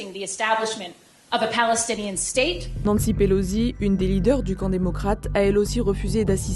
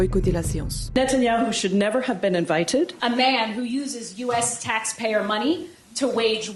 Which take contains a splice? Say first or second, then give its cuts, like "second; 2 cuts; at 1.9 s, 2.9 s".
first; 1 cut; at 2.7 s